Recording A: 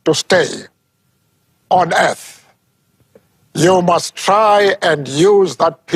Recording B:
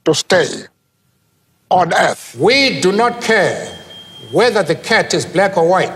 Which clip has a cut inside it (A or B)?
B